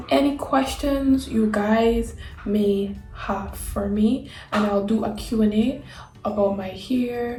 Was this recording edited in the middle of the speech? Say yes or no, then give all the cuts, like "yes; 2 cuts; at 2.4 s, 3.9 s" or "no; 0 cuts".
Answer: no; 0 cuts